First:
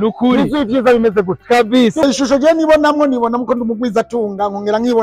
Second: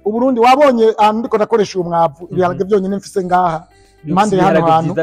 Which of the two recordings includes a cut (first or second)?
first